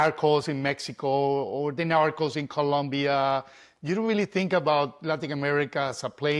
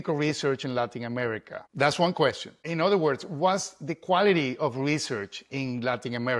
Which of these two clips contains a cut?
second; 2 cuts; at 1.6 s, 2.7 s

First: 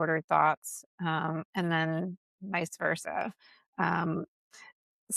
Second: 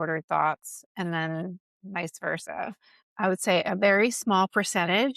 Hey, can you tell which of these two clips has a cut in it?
second; 2 cuts; at 0.9 s, 3.0 s

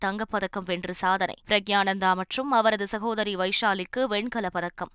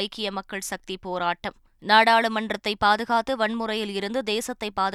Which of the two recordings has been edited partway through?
first; 1 cut; at 1.4 s

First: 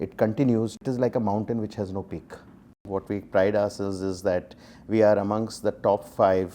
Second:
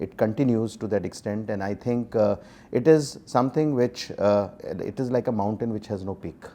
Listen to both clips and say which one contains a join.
first; 2 cuts; at 0.8 s, 2.9 s

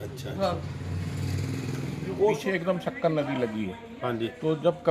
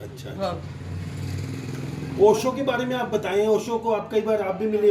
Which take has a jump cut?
first; 1 cut; at 2.4 s

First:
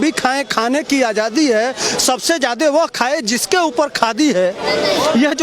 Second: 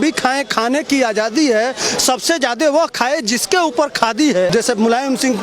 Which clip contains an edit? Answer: second; 1 cut; at 4.5 s

